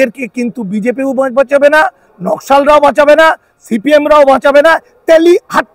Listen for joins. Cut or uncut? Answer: uncut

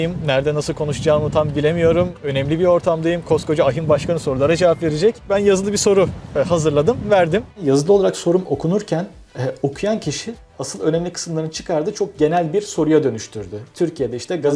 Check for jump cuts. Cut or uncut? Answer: uncut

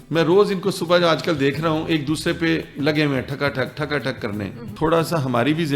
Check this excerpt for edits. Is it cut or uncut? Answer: cut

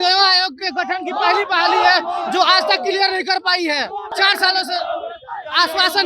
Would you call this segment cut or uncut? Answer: cut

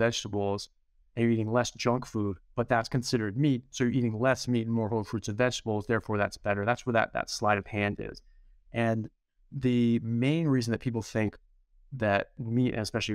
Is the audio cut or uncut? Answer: uncut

